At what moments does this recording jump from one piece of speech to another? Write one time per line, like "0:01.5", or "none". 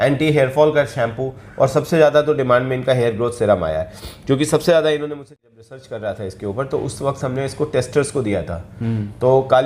0:05.2

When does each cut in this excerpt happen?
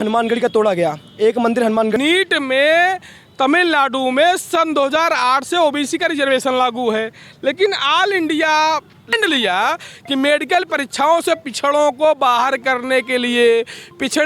0:02.0
0:09.1

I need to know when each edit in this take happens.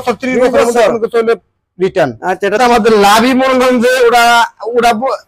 0:02.6

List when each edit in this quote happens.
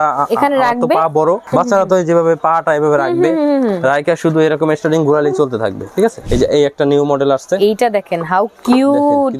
0:01.4
0:06.2

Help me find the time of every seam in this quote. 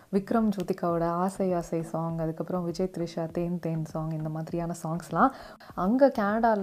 0:05.5

